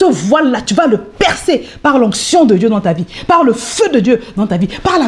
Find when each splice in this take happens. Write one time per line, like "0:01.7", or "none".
none